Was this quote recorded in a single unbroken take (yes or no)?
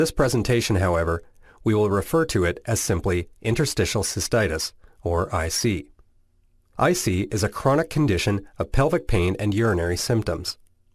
no